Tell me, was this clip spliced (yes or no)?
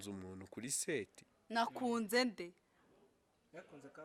no